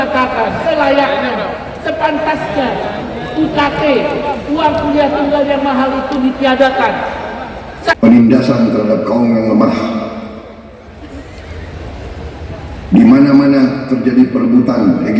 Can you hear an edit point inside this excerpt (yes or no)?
yes